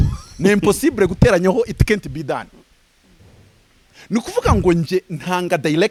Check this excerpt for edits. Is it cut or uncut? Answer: uncut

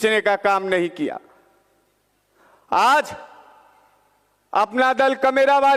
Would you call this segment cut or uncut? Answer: uncut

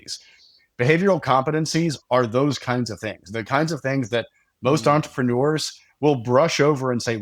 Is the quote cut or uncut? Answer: uncut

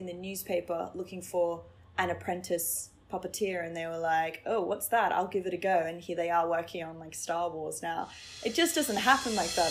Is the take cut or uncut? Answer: uncut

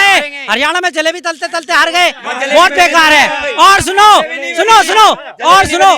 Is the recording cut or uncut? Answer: uncut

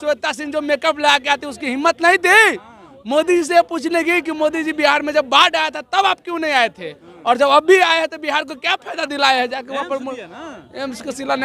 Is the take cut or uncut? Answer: uncut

